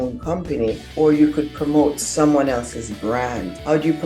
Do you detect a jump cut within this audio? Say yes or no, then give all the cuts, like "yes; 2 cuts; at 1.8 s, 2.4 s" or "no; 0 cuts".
no; 0 cuts